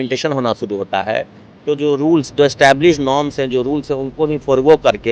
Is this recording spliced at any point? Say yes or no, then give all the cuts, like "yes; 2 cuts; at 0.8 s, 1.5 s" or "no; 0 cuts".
no; 0 cuts